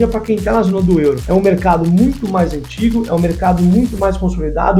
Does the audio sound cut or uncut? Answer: uncut